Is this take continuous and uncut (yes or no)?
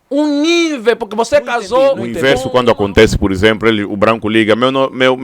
no